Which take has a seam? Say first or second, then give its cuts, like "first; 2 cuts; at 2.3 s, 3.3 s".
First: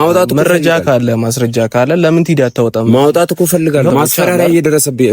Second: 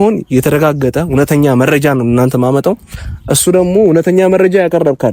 first; 1 cut; at 3.9 s